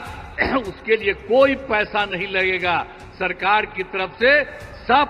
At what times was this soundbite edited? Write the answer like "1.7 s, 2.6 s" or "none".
none